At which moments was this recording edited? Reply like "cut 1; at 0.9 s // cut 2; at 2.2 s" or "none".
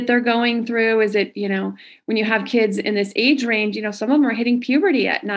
none